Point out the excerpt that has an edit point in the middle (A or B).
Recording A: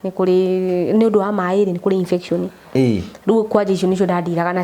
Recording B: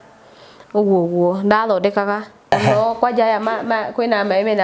B